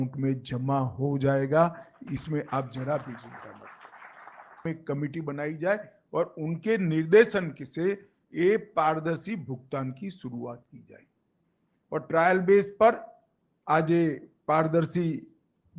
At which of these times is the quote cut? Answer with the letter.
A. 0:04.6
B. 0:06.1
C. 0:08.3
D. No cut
A